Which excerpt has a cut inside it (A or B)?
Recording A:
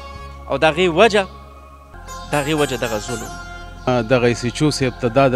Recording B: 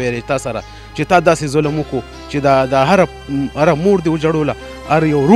A